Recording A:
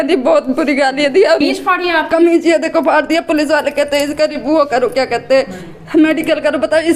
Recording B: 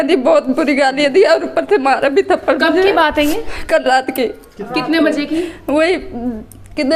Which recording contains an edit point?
A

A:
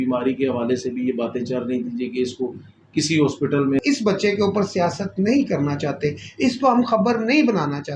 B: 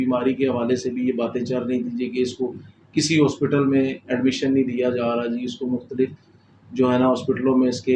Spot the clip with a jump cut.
A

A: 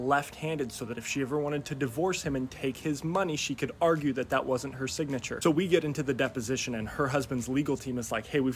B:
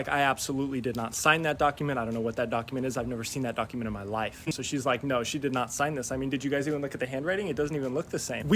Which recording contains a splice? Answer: B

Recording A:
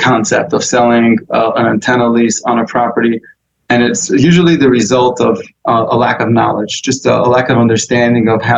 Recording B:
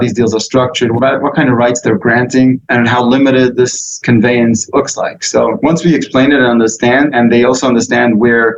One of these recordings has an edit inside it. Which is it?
B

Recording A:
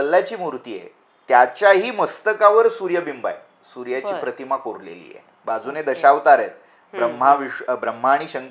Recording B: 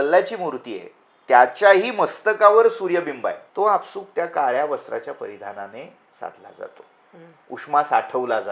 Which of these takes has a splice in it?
B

